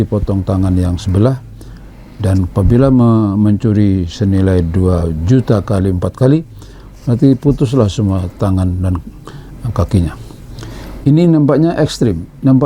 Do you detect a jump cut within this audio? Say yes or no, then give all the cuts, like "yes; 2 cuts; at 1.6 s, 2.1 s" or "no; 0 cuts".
no; 0 cuts